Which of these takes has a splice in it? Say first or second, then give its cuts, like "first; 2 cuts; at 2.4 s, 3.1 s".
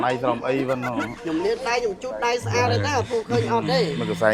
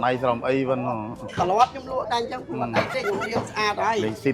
first; 1 cut; at 1.1 s